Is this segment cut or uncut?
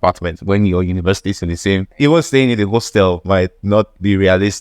cut